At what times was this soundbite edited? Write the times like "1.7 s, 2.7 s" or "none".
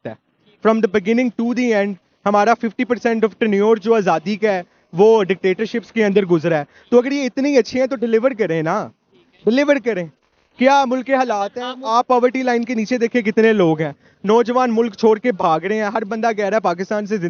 none